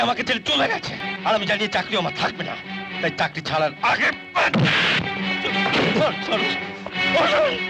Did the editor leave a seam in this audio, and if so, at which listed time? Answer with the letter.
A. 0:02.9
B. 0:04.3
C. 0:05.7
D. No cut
D